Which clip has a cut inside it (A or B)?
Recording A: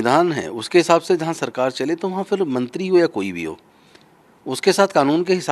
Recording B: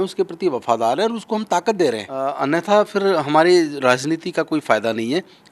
B